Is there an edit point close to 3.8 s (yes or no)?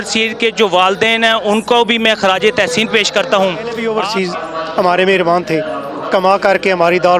yes